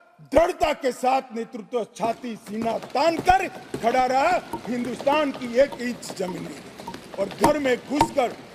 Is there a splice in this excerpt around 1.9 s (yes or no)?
no